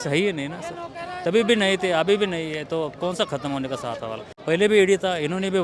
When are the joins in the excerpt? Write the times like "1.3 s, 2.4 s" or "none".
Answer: 4.3 s